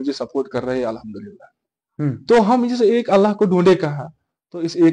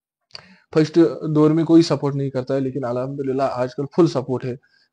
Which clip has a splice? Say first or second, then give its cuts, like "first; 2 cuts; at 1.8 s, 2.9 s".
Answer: first; 1 cut; at 1.9 s